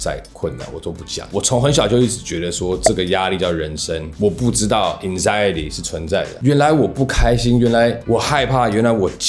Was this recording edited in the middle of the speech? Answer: yes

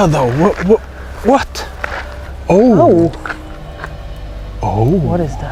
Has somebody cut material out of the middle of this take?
no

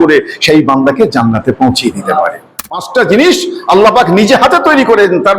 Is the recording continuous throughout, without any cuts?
no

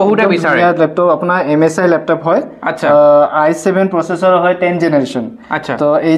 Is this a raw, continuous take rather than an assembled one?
yes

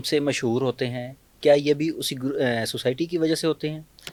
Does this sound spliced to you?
no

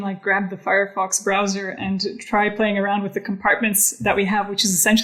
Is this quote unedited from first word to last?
yes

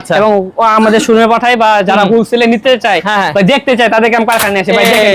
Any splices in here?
no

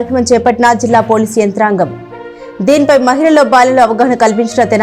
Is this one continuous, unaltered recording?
yes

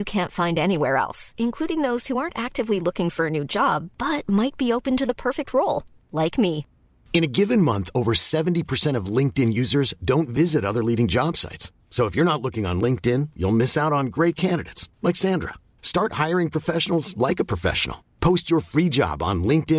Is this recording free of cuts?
yes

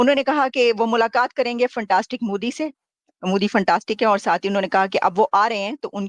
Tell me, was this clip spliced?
no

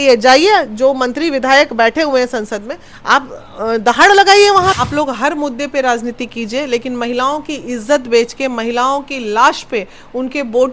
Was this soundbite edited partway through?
yes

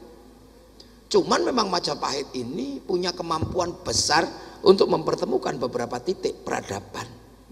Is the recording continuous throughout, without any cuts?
yes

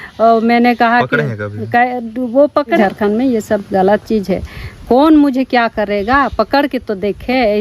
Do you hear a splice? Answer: yes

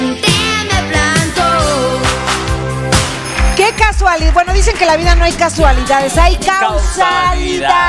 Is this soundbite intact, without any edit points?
yes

